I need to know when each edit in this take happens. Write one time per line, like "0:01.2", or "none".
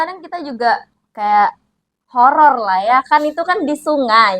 0:01.0